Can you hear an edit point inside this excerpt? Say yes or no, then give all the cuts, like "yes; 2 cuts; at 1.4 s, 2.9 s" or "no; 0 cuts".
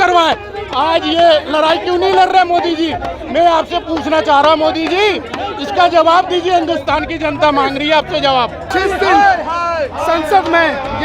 yes; 1 cut; at 8.7 s